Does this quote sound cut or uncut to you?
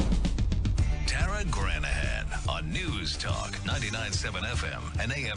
uncut